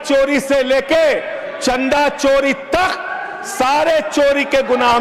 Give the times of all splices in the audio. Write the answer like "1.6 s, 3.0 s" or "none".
none